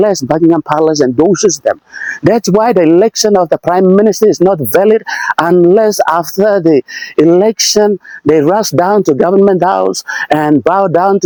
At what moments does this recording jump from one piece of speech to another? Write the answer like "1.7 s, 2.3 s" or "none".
none